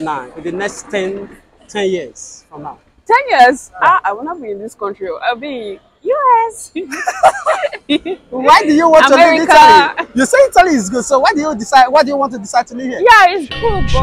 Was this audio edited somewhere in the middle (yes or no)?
no